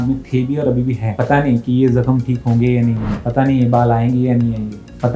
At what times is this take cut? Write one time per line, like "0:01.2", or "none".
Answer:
none